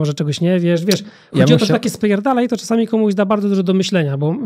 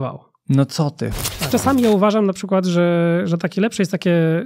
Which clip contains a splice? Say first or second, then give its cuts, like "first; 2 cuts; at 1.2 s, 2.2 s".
second; 1 cut; at 1.5 s